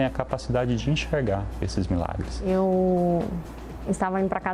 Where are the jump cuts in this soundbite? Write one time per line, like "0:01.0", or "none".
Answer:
0:02.5

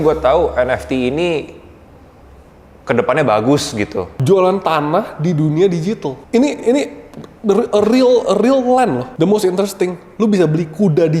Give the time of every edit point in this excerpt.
0:04.1
0:09.1

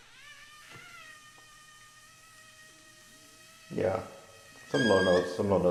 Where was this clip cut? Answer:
none

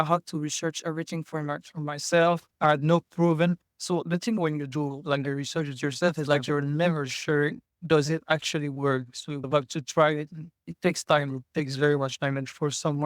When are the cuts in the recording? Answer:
none

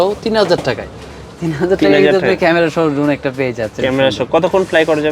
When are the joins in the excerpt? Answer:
none

